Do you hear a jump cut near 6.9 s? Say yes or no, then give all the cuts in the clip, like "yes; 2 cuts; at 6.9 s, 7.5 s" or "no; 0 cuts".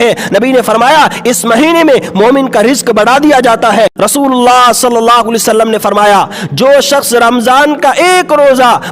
no; 1 cut; at 3.9 s